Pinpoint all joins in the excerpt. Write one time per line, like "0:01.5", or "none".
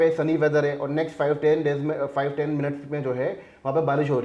none